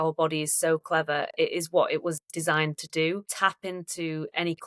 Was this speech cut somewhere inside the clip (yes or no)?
yes